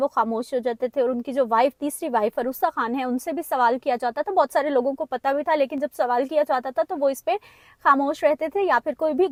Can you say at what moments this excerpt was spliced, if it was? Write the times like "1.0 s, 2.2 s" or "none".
none